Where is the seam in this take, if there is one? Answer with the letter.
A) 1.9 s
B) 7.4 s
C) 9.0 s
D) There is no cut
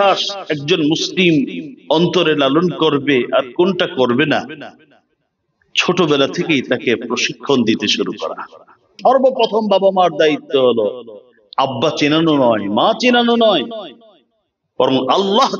C